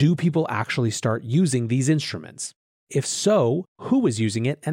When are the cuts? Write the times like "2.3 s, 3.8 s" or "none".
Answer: 2.9 s

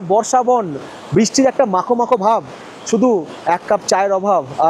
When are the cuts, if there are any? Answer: none

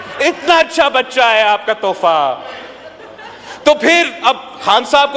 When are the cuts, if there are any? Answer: none

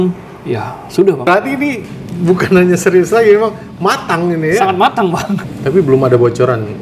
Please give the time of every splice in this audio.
1.3 s, 5.5 s

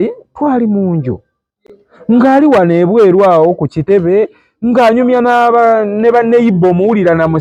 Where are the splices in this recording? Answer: none

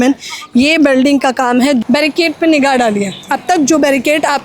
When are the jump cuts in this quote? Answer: 1.8 s

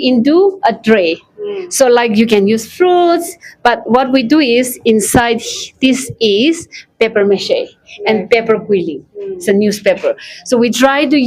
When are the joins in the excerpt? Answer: none

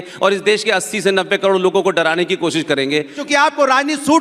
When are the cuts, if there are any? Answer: 3.2 s

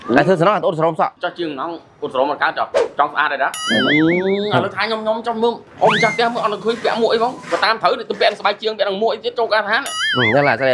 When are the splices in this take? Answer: 1.2 s, 3.6 s

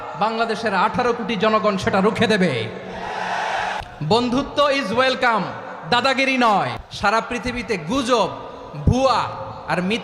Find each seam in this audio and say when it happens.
3.8 s, 6.8 s

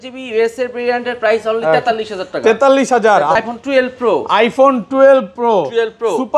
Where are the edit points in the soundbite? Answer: 3.4 s

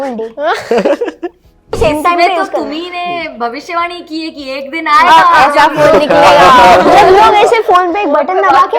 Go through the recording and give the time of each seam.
1.8 s

